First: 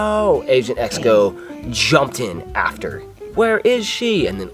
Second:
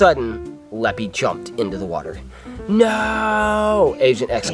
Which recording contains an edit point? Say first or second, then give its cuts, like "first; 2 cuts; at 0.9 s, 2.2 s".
first; 1 cut; at 3.3 s